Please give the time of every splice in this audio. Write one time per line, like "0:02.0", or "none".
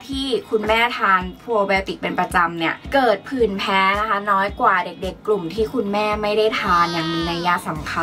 none